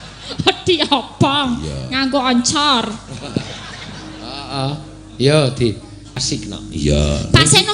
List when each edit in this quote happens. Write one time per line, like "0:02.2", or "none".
0:06.2